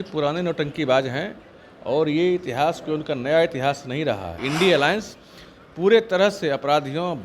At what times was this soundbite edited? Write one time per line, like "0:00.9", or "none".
0:04.4